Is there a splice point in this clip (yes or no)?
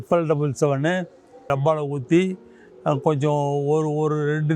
yes